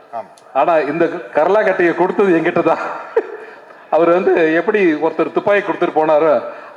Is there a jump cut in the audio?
no; 0 cuts

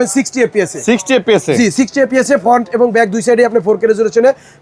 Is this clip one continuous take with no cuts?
yes; 0 cuts

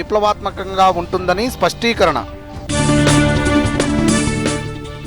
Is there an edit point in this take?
yes; 1 cut; at 3.8 s

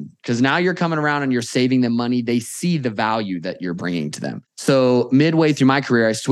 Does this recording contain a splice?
yes; 1 cut; at 4.5 s

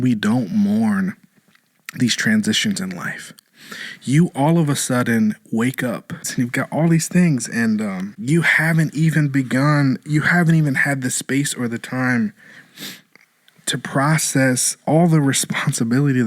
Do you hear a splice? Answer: yes; 2 cuts; at 6.3 s, 8.1 s

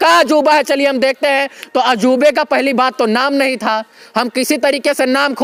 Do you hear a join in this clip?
no; 0 cuts

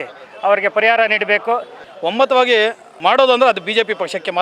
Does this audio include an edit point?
yes; 1 cut; at 1.8 s

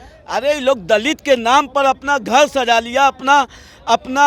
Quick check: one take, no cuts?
yes; 0 cuts

